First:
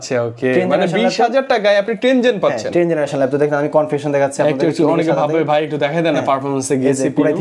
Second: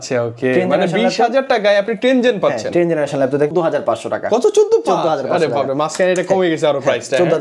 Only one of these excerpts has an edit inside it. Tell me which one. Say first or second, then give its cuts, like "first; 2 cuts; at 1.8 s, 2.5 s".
second; 1 cut; at 3.5 s